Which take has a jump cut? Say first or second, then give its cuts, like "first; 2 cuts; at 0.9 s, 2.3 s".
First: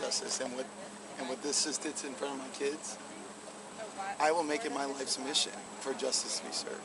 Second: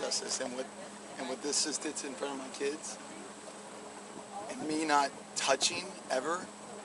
first; 2 cuts; at 3.6 s, 5.7 s